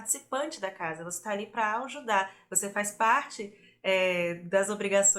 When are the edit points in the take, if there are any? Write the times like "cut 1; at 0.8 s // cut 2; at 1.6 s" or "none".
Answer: none